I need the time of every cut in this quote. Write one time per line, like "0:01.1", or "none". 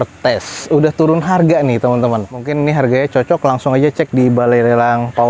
0:02.4